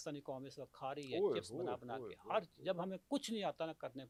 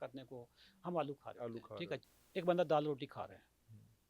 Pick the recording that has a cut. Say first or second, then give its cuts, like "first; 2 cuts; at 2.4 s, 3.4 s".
second; 1 cut; at 2.0 s